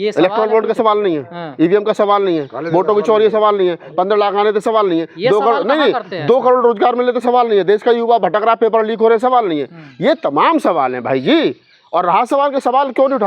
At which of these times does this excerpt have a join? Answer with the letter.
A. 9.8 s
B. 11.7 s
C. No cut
C